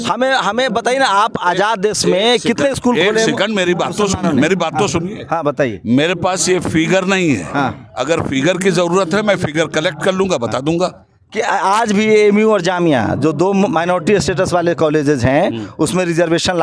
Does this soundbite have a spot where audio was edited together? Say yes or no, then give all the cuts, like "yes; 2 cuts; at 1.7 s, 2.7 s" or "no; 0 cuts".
no; 0 cuts